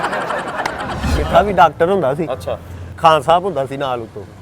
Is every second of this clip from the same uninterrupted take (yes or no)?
no